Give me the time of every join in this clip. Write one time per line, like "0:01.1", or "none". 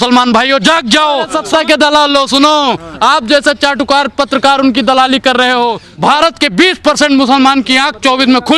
0:01.4
0:05.9